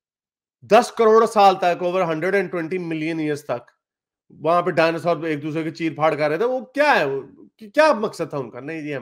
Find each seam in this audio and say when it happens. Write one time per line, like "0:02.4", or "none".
none

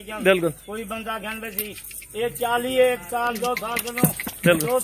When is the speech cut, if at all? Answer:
none

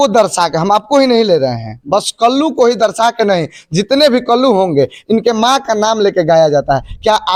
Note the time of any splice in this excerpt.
none

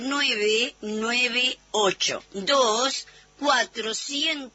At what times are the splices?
0:02.1

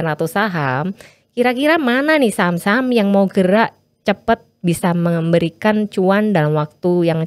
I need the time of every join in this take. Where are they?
none

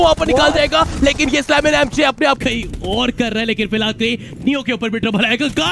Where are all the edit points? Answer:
0:02.4

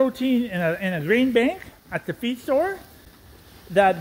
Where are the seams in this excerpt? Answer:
none

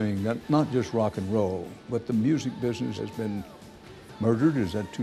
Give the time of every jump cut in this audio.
0:01.7
0:02.9

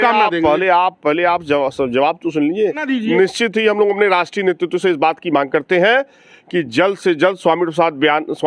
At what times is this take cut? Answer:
0:02.8

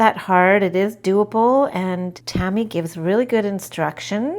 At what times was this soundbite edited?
0:02.2

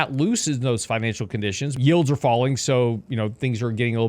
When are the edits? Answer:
0:01.8

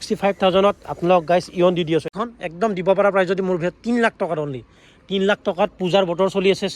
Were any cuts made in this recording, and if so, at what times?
0:02.1

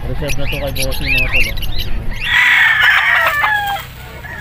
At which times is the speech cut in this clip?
0:02.3

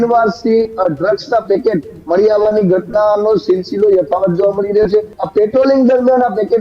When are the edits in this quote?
0:05.1

